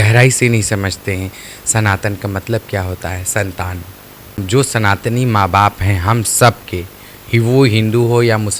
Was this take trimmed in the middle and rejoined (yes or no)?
yes